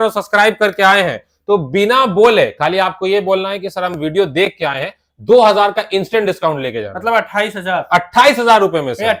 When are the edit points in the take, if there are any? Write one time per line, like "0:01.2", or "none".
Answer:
none